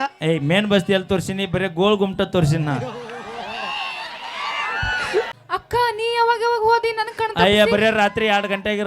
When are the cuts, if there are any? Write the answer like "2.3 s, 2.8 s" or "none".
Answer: 5.4 s

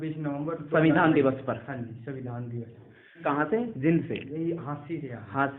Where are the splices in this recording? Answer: 3.2 s

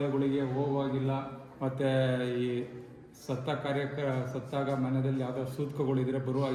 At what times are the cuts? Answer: none

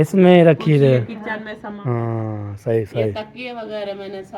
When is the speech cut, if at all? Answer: 1.7 s

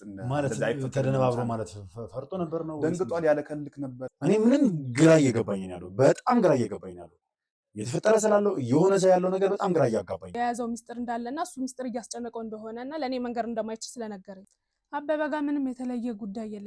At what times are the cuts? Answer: 4.0 s, 10.4 s, 14.4 s

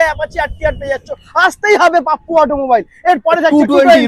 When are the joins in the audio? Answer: none

